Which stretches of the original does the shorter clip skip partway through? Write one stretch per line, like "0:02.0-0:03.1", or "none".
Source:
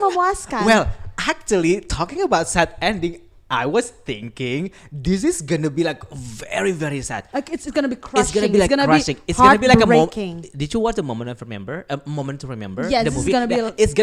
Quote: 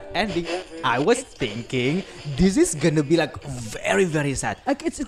none